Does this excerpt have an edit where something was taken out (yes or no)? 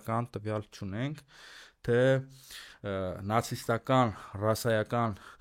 no